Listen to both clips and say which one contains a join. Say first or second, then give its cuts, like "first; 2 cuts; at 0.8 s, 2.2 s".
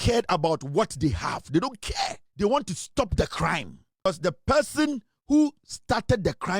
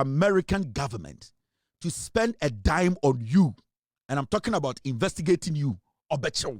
first; 2 cuts; at 2.2 s, 4.0 s